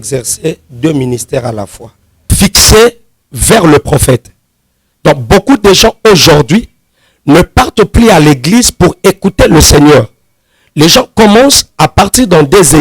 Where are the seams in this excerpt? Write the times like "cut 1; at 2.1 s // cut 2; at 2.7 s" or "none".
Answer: cut 1; at 2.3 s

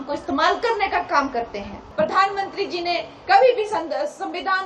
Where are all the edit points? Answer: cut 1; at 1.8 s

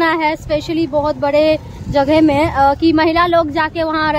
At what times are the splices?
none

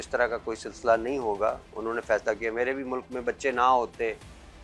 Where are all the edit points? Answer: none

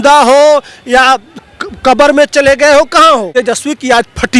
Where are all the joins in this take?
cut 1; at 3.3 s

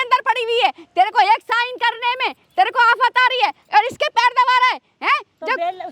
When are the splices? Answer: none

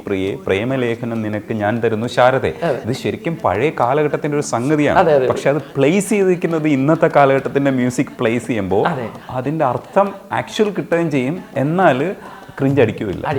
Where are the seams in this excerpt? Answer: none

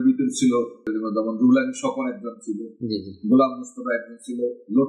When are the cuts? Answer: cut 1; at 0.9 s

